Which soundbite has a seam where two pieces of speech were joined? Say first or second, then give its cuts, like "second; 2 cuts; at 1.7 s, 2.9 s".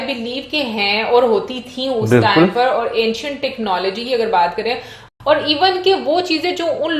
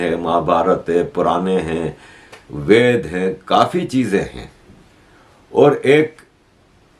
first; 1 cut; at 5.0 s